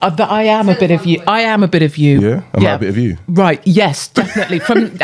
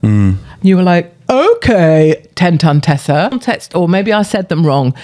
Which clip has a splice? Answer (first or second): second